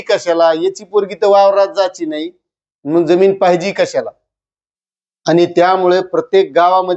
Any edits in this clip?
no; 0 cuts

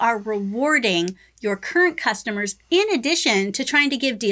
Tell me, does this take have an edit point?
no; 0 cuts

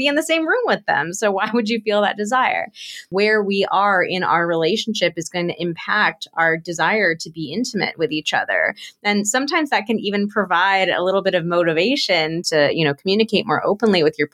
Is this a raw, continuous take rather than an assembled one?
no; 2 cuts; at 3.1 s, 12.4 s

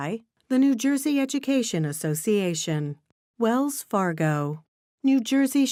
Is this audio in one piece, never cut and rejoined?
yes; 0 cuts

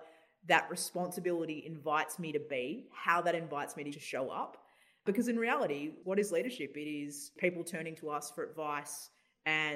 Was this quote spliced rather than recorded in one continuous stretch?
yes; 4 cuts; at 3.9 s, 5.0 s, 5.9 s, 7.3 s

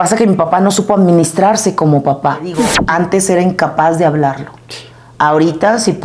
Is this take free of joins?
no; 1 cut; at 2.7 s

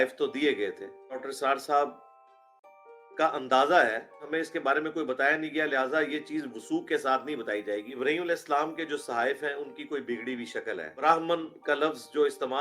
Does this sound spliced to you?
yes; 4 cuts; at 1.3 s, 4.3 s, 7.9 s, 11.0 s

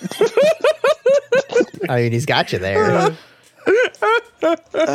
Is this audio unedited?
no; 1 cut; at 1.7 s

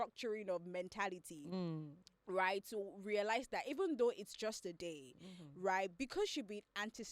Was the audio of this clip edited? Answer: no; 0 cuts

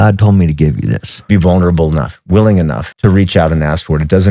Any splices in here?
yes; 2 cuts; at 1.3 s, 2.9 s

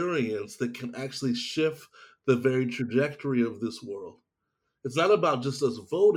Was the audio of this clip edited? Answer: no; 0 cuts

